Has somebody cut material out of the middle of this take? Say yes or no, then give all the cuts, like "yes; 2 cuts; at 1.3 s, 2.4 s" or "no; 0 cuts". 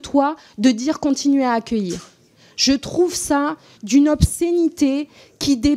no; 0 cuts